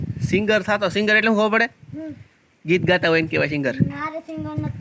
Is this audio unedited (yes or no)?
yes